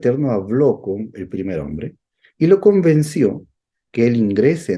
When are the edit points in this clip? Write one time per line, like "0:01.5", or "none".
none